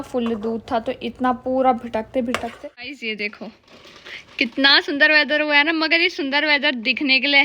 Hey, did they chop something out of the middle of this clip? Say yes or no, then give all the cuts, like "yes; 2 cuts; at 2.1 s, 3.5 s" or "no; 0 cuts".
yes; 1 cut; at 2.5 s